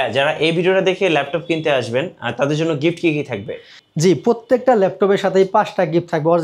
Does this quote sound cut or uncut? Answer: uncut